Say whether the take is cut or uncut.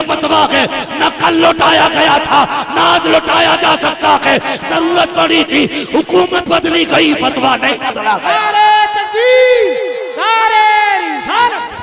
uncut